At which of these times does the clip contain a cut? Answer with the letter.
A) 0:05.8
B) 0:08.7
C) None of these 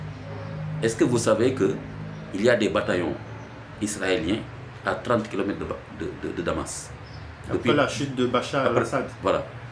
C